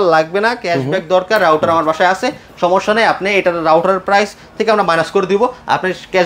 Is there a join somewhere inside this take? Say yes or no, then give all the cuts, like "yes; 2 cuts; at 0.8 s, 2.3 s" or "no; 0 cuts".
no; 0 cuts